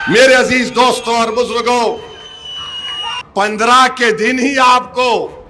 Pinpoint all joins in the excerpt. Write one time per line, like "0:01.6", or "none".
0:03.0